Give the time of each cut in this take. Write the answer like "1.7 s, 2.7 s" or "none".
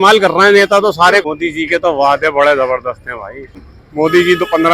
1.2 s, 3.7 s